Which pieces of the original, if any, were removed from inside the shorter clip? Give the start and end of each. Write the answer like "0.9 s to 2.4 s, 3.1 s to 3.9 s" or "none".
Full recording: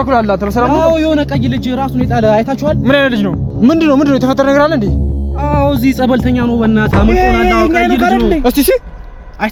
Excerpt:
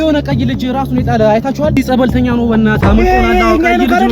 2.8 s to 5.9 s